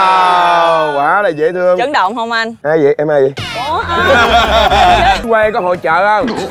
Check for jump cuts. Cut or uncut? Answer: cut